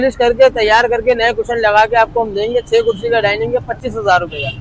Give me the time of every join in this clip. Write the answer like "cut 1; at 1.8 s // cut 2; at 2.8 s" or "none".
none